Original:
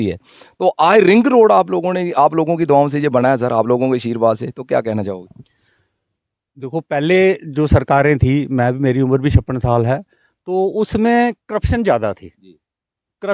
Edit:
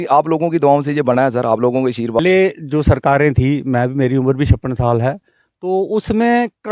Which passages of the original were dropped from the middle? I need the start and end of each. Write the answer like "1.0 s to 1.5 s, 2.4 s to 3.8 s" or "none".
4.3 s to 7.0 s